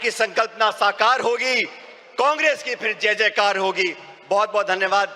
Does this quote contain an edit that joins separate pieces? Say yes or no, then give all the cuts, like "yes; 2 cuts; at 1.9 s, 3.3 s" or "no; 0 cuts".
no; 0 cuts